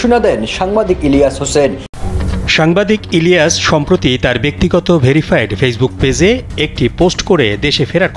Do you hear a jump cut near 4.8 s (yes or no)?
no